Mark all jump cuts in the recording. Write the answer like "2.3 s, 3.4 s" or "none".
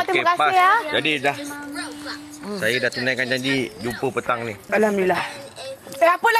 4.6 s